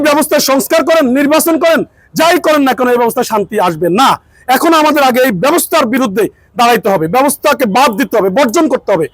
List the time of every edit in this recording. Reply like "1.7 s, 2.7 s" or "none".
none